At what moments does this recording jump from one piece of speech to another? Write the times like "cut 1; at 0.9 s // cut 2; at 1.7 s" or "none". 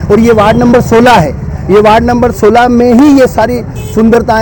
none